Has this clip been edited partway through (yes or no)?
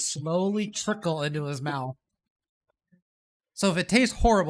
no